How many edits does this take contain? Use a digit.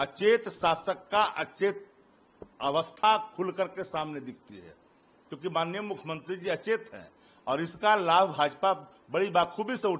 0